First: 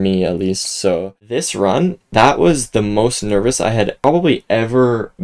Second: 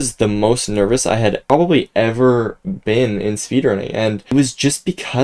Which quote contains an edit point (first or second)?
first